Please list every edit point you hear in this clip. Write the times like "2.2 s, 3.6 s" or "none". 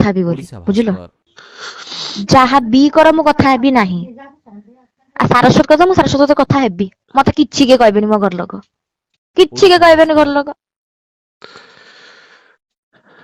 none